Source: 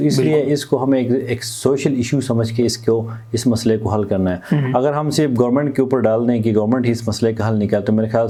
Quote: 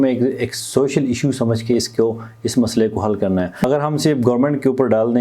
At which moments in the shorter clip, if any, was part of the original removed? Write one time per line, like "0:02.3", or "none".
0:03.6